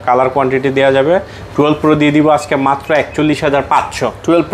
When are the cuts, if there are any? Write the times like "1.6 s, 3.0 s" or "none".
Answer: none